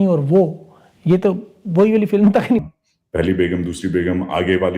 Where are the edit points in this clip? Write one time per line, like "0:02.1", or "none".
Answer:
0:02.6